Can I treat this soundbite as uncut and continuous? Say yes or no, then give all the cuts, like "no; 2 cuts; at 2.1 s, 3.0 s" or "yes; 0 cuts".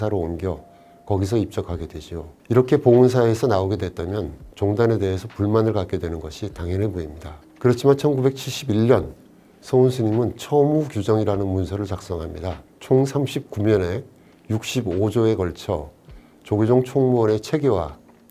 no; 1 cut; at 12.7 s